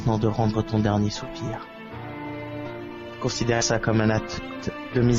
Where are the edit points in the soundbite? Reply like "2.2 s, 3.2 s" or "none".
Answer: none